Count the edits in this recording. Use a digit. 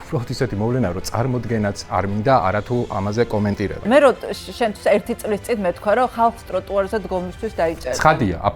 1